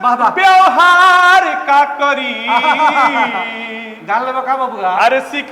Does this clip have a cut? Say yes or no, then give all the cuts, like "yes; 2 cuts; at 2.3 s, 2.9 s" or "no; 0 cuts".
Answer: no; 0 cuts